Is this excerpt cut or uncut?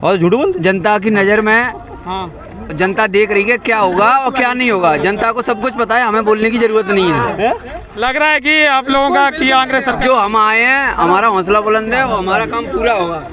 uncut